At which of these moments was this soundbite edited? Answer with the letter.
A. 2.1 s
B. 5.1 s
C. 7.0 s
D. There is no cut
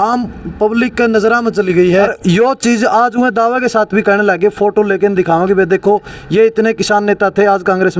A